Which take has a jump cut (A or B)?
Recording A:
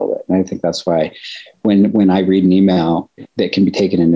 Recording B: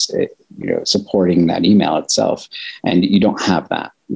A